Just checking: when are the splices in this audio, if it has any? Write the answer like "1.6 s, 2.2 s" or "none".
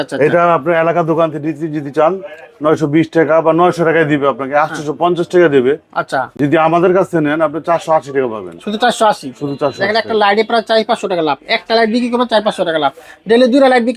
none